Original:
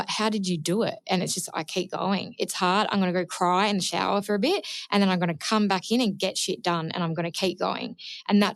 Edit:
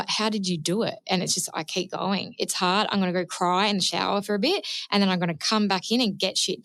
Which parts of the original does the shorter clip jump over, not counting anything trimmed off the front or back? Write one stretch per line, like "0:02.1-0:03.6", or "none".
none